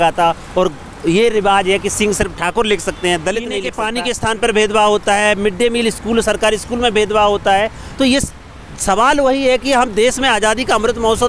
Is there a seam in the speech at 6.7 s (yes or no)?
no